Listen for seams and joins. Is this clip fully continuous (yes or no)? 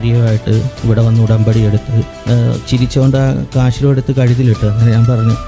no